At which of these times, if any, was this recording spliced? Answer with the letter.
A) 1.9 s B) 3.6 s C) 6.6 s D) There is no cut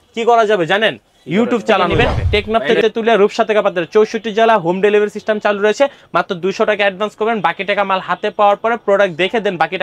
A